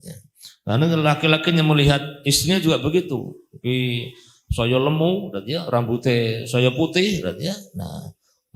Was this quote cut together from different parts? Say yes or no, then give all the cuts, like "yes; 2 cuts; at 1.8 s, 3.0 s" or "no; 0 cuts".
no; 0 cuts